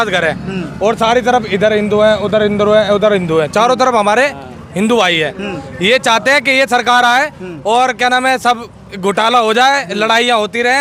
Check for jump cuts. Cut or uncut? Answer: uncut